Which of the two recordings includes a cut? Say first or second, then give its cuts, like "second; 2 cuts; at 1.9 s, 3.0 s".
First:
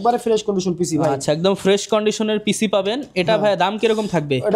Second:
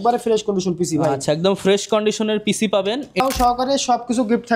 second; 1 cut; at 3.2 s